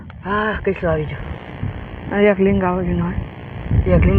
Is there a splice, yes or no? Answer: no